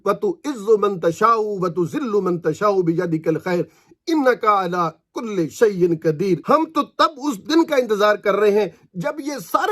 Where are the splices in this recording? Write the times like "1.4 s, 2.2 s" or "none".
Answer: 6.4 s